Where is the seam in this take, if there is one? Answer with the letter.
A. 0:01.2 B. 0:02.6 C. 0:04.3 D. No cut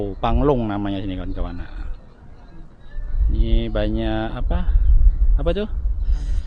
D